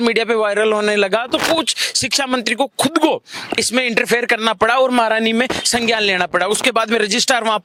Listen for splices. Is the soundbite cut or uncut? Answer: uncut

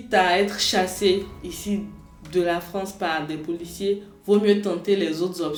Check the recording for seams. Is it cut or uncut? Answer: uncut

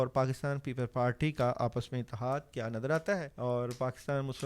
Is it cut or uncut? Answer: cut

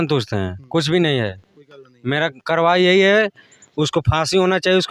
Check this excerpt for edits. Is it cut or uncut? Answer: uncut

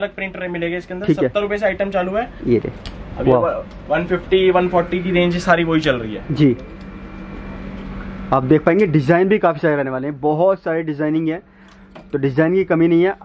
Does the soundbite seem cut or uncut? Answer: cut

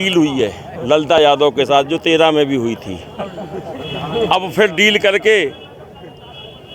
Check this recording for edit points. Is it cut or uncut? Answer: uncut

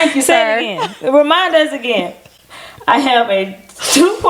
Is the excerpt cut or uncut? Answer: uncut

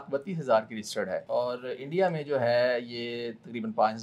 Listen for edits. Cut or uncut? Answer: uncut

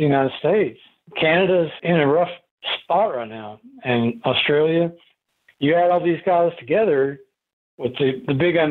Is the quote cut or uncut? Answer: uncut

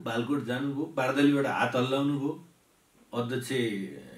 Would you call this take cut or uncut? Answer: uncut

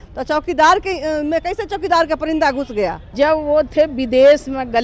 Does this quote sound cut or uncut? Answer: cut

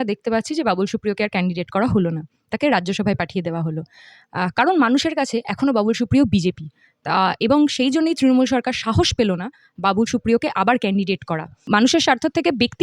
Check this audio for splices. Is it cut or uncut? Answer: cut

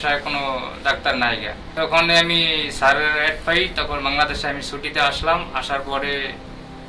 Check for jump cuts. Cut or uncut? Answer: cut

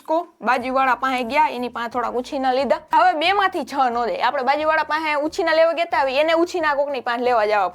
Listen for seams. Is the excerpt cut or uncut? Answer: cut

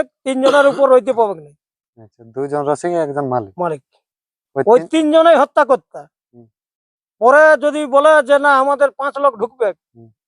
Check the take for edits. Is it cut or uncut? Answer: uncut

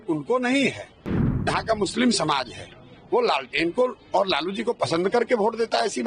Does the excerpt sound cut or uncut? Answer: uncut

